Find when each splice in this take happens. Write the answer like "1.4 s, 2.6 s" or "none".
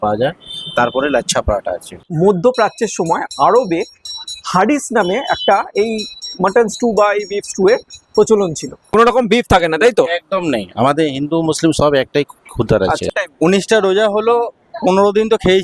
2.0 s, 8.9 s, 13.2 s